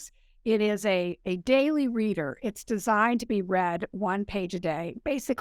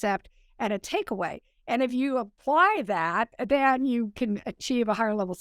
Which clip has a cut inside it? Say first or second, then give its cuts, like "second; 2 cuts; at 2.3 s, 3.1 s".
second; 1 cut; at 2.4 s